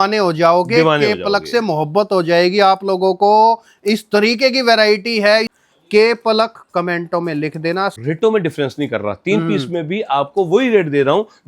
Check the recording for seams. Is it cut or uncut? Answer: cut